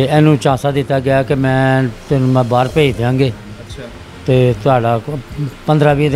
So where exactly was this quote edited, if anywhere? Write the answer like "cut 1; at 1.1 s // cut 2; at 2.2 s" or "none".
none